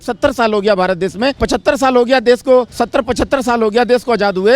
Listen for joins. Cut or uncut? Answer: cut